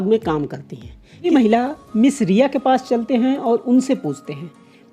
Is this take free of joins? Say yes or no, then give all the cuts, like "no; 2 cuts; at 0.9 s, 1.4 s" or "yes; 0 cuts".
no; 1 cut; at 1.3 s